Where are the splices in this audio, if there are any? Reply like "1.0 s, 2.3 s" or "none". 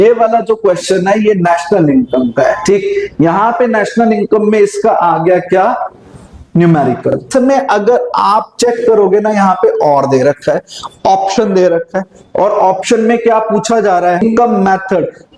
7.3 s, 14.2 s